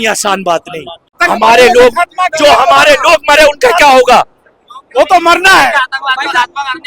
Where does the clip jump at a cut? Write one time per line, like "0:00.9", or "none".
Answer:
0:01.2